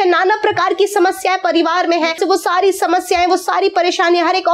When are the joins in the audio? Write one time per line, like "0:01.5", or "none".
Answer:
0:02.2

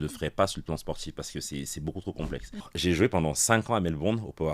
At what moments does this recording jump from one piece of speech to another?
0:02.7

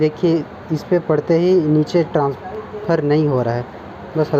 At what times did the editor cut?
none

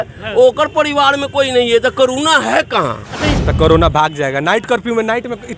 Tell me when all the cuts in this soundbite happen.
0:03.4

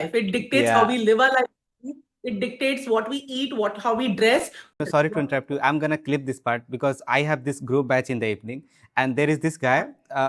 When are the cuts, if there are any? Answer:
0:04.8

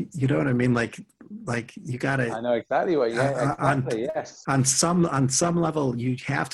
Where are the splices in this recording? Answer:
none

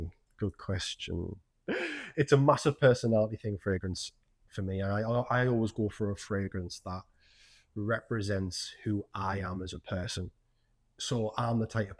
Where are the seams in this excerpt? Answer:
0:01.7

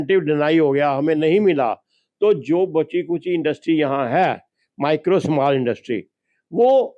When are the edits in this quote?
none

